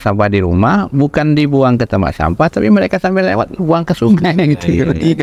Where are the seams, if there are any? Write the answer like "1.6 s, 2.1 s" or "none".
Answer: none